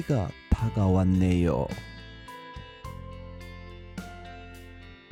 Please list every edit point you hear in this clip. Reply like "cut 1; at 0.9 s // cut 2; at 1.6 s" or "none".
none

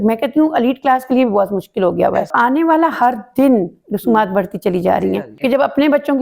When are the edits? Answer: cut 1; at 2.3 s // cut 2; at 5.3 s

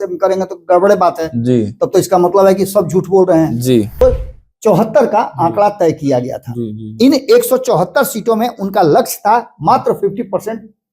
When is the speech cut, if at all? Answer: cut 1; at 4.0 s

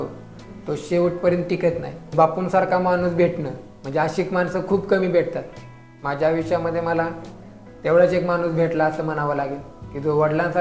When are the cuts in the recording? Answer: cut 1; at 2.0 s

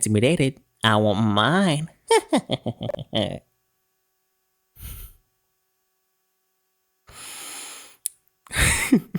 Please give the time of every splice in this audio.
none

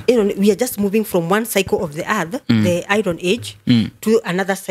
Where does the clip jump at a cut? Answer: none

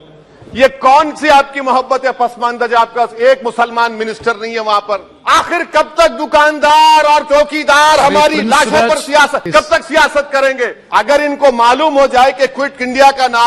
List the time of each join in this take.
cut 1; at 5.1 s // cut 2; at 9.4 s // cut 3; at 10.8 s

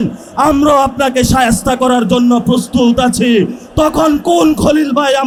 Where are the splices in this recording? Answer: none

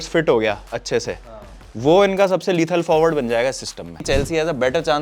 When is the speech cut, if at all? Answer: cut 1; at 4.0 s

